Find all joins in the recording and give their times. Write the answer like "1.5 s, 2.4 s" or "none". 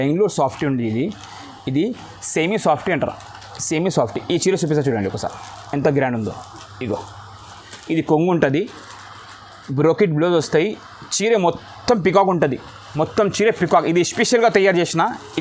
none